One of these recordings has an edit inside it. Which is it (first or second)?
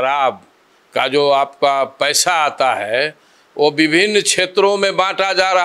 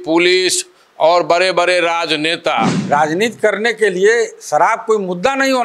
second